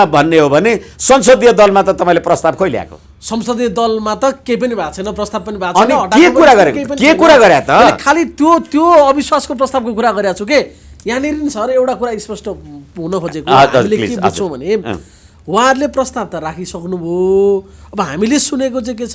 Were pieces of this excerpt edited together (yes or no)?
no